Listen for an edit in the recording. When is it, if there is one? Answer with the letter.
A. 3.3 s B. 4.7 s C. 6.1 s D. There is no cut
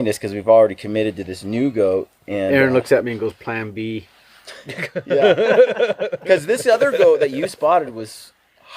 D